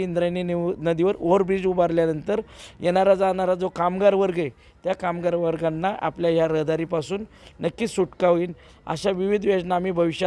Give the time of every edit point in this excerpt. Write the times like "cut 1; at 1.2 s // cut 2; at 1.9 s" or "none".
none